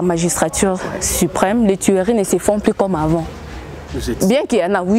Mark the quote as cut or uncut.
uncut